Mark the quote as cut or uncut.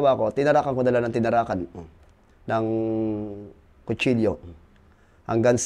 uncut